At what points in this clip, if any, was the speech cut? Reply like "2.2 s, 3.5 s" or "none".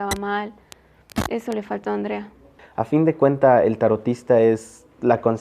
2.5 s